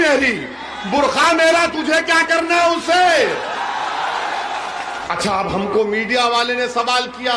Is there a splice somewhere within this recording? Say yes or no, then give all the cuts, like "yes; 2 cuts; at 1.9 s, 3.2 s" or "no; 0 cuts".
yes; 1 cut; at 5.0 s